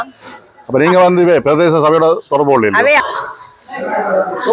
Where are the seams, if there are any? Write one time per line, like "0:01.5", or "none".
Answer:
0:03.0